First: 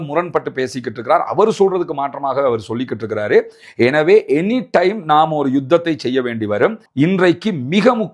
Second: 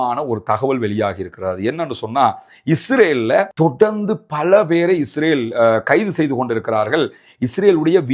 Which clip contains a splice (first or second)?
first